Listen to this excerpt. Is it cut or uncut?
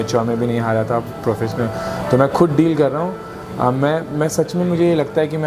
uncut